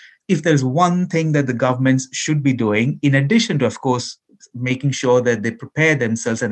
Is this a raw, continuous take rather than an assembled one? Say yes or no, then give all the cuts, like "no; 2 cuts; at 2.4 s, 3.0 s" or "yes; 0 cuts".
yes; 0 cuts